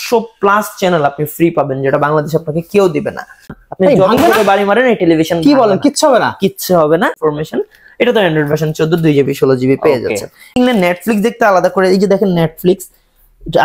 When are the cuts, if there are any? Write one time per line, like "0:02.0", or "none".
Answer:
0:03.6
0:07.2
0:10.5